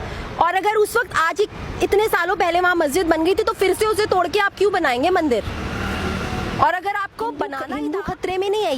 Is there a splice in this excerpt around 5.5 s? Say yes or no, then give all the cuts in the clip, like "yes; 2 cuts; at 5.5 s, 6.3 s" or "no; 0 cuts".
no; 1 cut; at 7.6 s